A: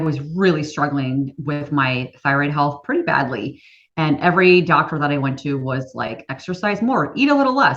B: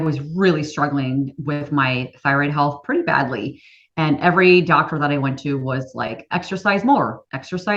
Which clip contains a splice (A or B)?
A